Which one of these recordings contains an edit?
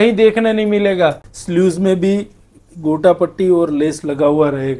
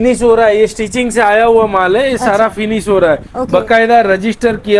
first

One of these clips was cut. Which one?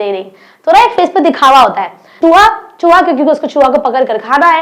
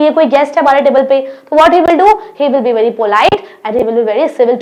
first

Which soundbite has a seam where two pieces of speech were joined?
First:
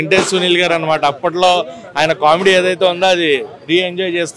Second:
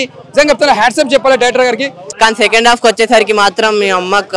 second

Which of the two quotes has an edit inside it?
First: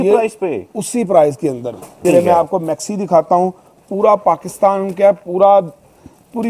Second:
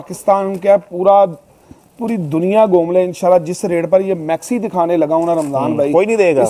first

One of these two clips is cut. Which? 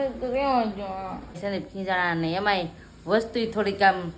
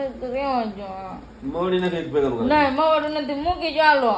first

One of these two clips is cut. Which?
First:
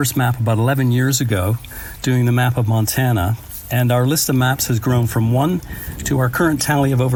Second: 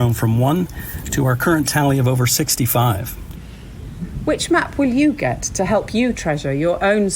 second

